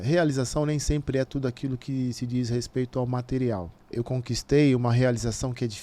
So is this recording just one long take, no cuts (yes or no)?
no